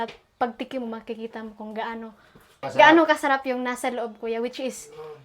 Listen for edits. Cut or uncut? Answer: cut